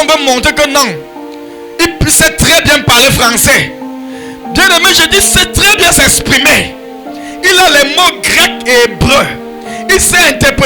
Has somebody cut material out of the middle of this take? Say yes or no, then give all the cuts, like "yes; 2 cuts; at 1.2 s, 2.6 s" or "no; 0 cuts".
no; 0 cuts